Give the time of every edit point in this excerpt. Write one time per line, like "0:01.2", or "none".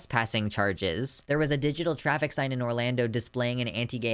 0:01.1